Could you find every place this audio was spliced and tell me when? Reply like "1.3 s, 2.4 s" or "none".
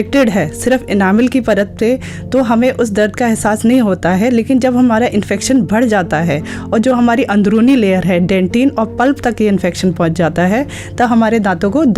none